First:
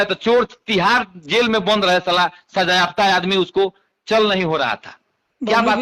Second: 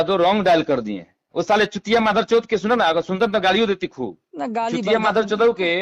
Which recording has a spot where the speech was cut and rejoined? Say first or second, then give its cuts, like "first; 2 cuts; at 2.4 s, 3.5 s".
second; 1 cut; at 1.2 s